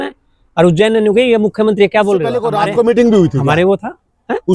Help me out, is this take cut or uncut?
cut